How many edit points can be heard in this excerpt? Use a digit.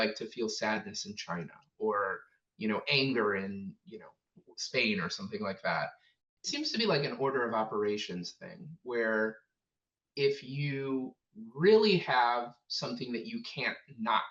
1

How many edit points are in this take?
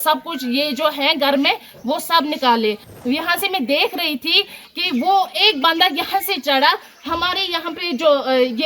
1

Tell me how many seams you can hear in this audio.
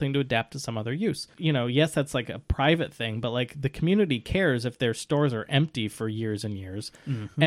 1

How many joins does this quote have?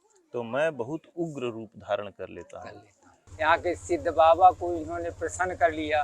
1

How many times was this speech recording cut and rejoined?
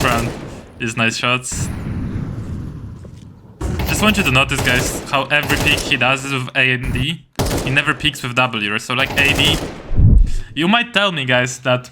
1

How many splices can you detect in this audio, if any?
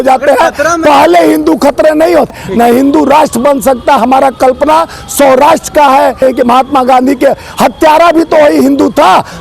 2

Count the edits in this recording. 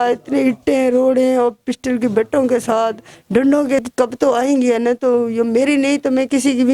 1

